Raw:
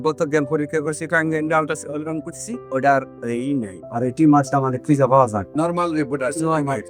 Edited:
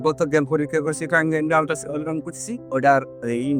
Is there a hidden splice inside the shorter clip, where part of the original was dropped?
no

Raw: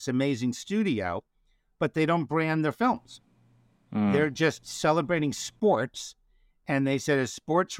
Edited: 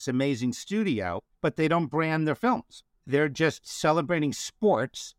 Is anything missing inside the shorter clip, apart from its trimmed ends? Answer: yes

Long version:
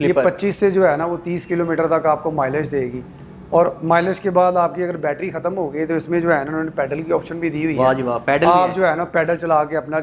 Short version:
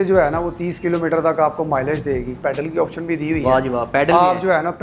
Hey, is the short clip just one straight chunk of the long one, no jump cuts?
no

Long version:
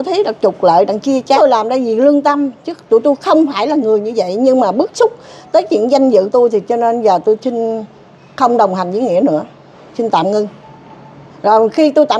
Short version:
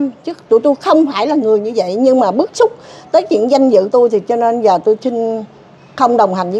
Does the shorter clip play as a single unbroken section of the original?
yes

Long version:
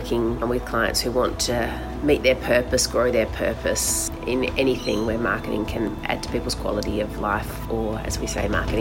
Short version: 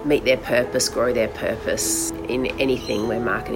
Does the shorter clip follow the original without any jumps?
yes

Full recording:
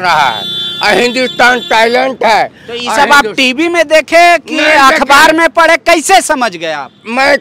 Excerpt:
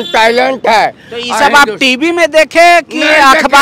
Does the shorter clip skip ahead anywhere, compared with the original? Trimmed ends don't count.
no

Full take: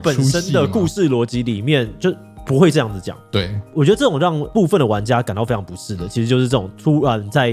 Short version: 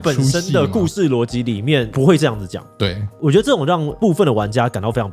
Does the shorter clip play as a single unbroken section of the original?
no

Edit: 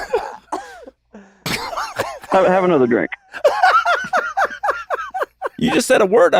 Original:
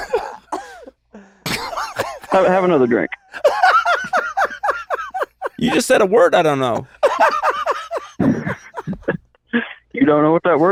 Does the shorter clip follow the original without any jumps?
yes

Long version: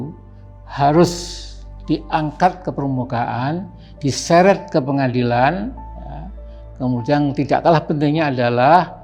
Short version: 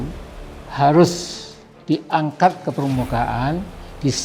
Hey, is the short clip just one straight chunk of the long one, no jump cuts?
yes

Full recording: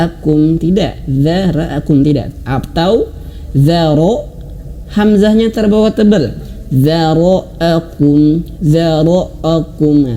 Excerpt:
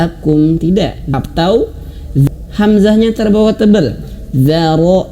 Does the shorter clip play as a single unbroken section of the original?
no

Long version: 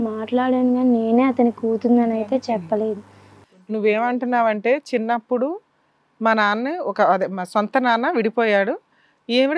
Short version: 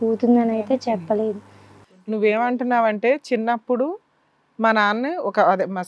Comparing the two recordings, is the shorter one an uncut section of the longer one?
yes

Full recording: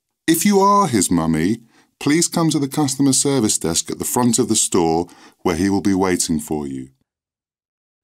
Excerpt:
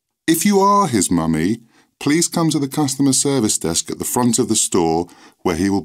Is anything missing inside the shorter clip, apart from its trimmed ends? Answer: no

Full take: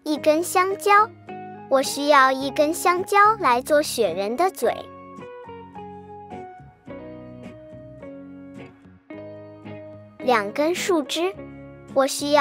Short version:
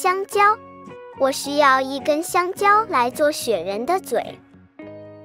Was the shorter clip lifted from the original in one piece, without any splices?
no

